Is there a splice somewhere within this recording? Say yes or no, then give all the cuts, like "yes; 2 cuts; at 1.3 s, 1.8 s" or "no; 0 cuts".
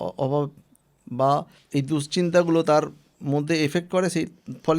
yes; 1 cut; at 1.6 s